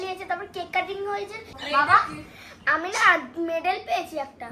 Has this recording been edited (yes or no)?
yes